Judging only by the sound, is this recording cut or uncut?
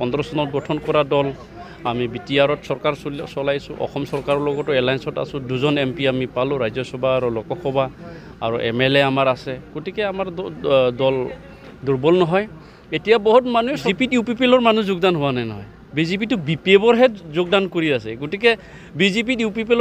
cut